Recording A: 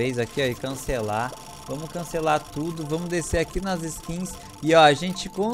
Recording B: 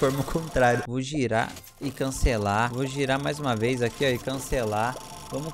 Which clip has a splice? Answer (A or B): B